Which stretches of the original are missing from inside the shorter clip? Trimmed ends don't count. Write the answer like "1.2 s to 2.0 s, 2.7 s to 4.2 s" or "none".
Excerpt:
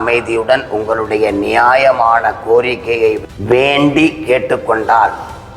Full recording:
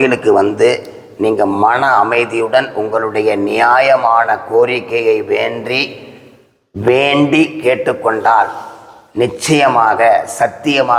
5.2 s to 6.6 s